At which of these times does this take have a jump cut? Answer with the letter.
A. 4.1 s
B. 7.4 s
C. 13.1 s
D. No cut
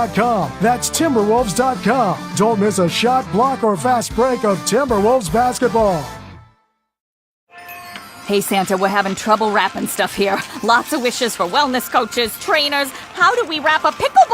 B